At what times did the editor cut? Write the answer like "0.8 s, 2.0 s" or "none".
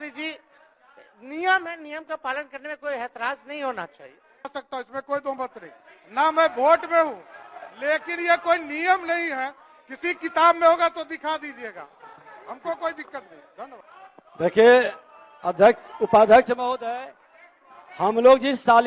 4.5 s